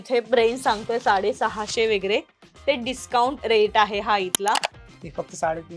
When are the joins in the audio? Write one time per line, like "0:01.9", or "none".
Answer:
0:03.4
0:04.8